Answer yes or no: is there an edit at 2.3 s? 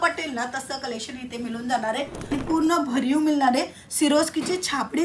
yes